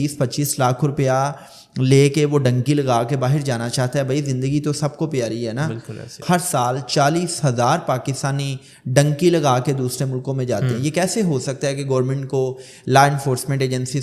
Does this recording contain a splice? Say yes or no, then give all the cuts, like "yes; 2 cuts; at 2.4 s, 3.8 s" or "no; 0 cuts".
yes; 1 cut; at 6.2 s